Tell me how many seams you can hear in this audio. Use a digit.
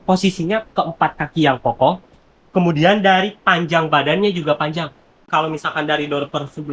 1